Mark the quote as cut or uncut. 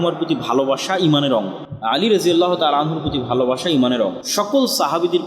cut